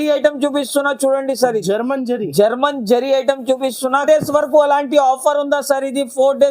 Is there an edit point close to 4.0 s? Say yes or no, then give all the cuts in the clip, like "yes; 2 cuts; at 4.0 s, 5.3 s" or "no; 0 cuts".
yes; 1 cut; at 4.0 s